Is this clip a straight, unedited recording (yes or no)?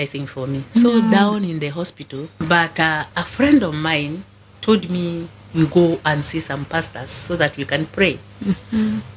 no